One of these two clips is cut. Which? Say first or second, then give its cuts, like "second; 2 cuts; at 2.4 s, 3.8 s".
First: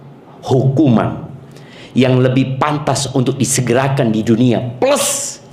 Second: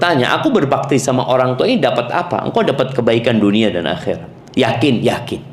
second; 1 cut; at 4.3 s